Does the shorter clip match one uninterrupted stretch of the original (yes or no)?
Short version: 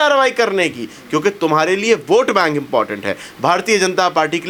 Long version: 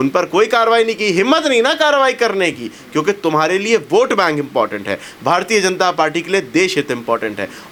yes